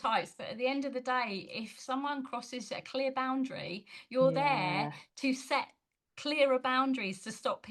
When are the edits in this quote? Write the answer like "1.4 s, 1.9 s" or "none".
none